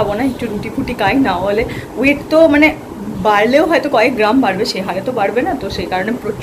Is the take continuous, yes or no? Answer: yes